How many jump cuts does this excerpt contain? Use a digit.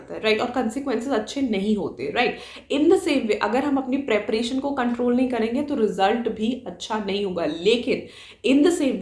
0